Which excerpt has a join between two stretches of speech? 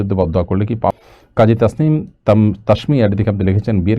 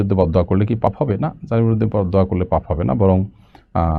first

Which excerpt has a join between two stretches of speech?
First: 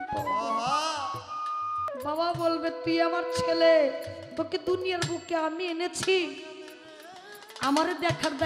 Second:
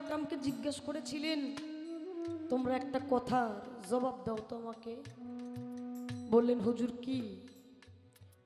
first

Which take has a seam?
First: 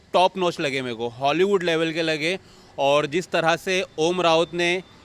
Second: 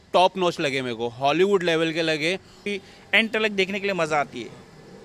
second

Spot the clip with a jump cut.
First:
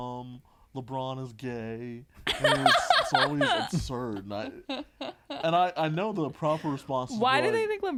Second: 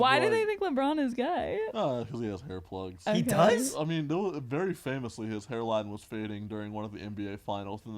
second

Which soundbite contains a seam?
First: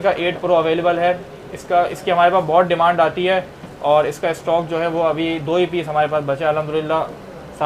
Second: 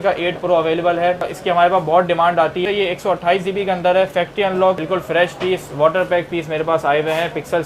second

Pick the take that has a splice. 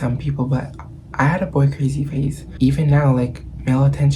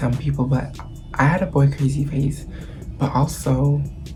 first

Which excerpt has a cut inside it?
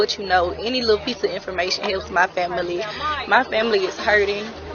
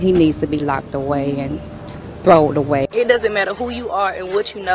second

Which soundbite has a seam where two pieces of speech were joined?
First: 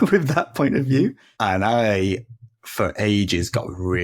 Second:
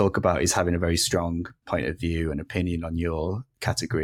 first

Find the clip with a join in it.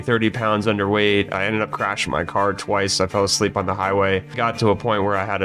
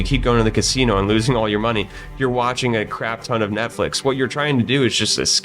first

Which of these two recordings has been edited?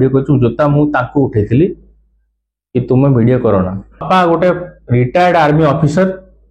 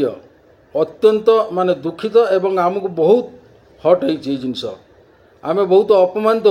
first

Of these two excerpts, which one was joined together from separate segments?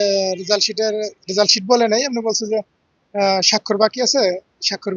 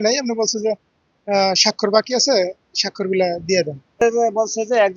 second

